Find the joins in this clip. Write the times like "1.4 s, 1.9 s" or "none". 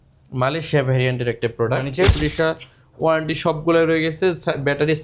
2.1 s